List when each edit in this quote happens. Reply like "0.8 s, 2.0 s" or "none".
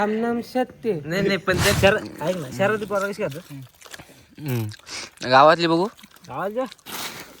1.7 s

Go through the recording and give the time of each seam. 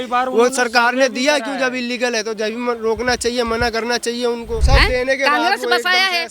4.6 s

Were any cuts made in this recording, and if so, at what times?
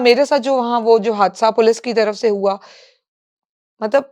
none

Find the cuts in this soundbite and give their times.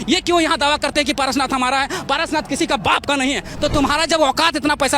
3.5 s

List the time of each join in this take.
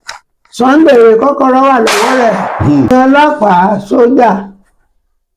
2.9 s

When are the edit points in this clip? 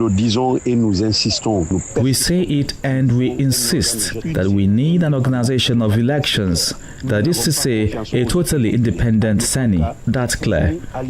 4.2 s, 10.0 s

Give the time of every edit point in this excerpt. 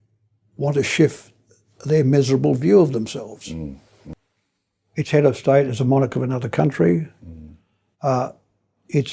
4.1 s

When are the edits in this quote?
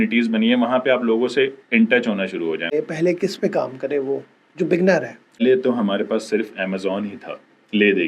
2.7 s, 5.4 s

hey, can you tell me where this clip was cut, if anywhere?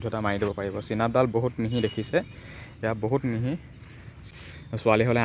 4.3 s

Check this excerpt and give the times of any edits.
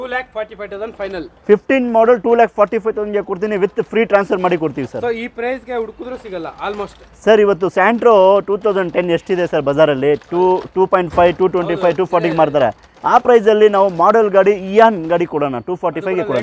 none

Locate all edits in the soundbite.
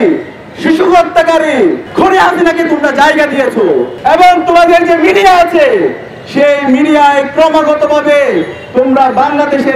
1.8 s, 3.9 s

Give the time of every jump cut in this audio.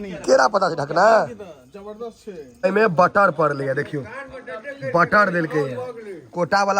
2.6 s

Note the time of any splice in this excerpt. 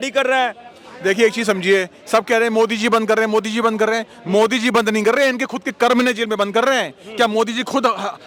none

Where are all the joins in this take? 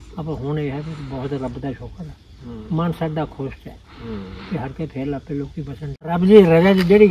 6.0 s

